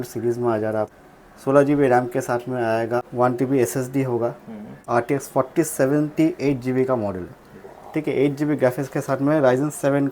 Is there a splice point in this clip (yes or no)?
yes